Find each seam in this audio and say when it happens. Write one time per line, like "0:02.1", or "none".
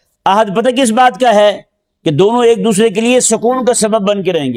none